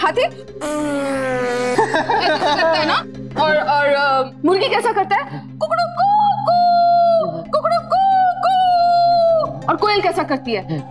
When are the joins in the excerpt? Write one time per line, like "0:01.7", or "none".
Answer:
0:09.6